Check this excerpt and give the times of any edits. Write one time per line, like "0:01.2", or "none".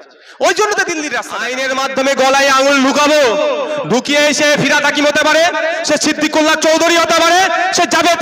0:01.4